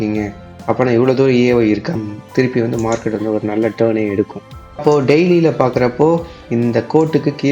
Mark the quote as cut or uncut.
cut